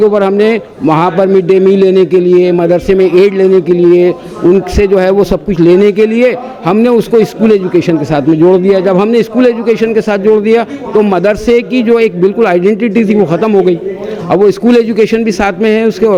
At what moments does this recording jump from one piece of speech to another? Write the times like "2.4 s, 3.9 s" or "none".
none